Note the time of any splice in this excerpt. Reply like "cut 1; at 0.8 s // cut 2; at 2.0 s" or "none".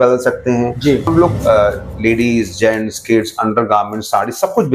cut 1; at 1.1 s